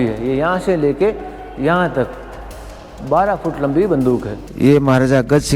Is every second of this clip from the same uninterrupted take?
no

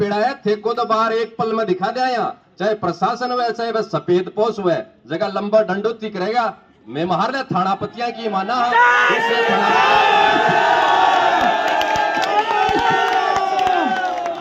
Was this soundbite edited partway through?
no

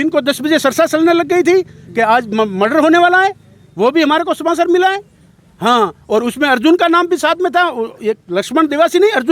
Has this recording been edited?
no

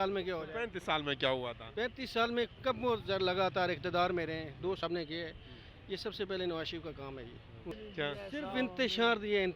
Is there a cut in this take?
yes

